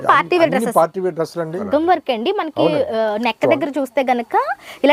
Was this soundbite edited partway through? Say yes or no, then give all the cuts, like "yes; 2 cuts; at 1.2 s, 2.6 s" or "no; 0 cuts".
yes; 1 cut; at 1.6 s